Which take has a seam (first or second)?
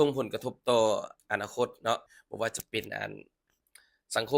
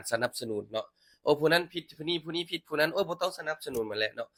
first